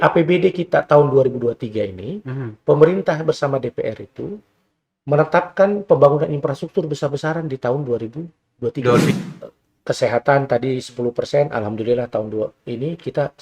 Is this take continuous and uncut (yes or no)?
no